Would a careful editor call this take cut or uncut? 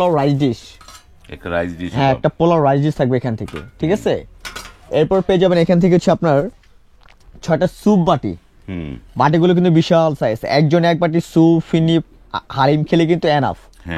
uncut